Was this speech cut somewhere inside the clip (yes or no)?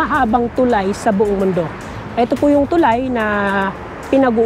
no